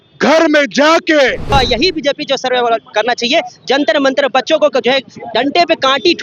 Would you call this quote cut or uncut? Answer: cut